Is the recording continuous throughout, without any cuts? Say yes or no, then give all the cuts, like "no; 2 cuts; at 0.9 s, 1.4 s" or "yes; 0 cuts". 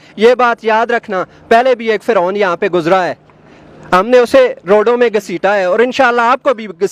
yes; 0 cuts